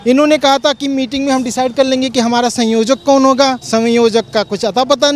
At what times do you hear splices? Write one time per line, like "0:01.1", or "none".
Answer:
0:03.6